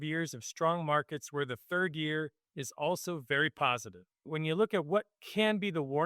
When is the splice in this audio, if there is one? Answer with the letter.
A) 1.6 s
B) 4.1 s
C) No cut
B